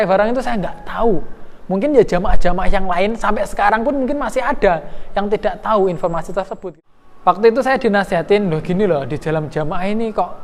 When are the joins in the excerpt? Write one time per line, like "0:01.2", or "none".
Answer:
0:06.6